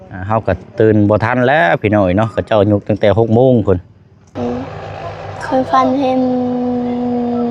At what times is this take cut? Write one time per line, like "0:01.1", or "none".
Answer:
0:04.2